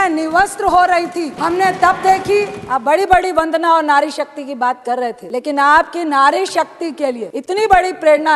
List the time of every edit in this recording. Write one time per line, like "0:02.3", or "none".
0:01.3
0:02.6
0:05.2
0:07.3